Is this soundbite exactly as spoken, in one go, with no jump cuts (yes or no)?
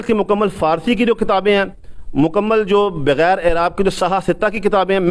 yes